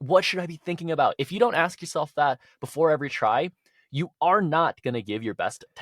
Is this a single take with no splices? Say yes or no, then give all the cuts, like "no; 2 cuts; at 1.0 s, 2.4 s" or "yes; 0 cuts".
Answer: yes; 0 cuts